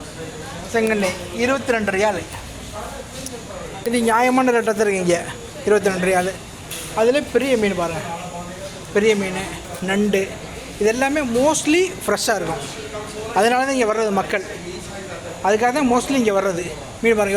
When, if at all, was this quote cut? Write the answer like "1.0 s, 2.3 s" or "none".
none